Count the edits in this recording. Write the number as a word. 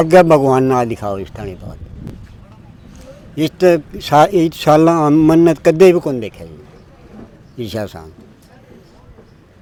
zero